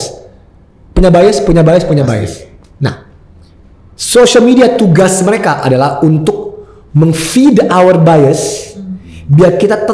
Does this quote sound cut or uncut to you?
uncut